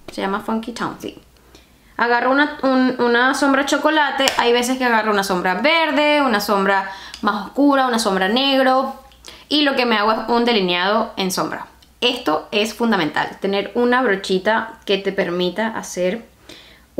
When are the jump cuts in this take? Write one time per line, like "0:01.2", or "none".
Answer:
none